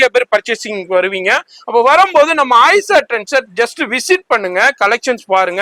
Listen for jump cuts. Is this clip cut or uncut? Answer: uncut